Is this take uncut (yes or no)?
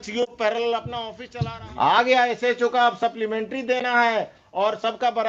no